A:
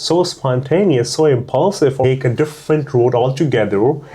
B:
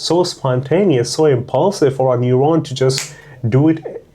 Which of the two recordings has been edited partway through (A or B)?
A